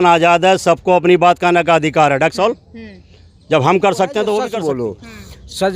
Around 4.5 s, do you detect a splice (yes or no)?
yes